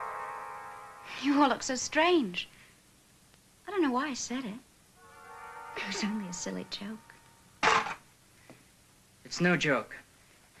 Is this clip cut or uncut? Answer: cut